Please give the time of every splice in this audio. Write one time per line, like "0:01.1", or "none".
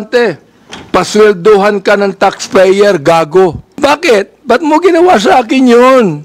0:03.6